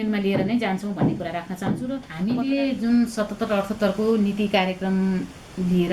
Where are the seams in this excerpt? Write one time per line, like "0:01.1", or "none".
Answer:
0:02.1